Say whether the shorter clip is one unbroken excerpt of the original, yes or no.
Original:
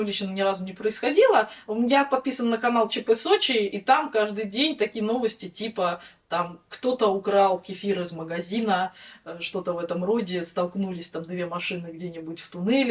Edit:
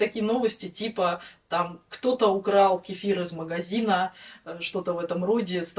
yes